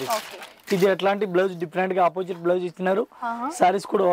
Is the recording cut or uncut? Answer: uncut